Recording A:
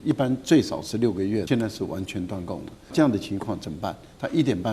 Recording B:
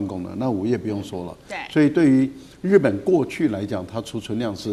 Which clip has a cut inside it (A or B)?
A